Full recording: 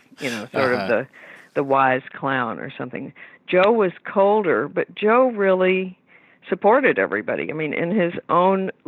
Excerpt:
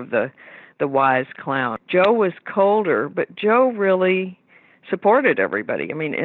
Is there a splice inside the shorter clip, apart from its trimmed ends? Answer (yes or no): yes